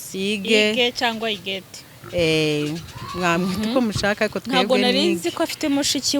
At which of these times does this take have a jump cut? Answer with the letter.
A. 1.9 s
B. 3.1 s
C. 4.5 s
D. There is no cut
D